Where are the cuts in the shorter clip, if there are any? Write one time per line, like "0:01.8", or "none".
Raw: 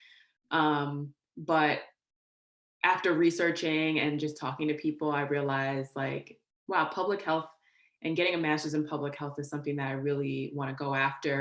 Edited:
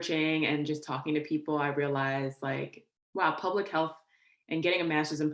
none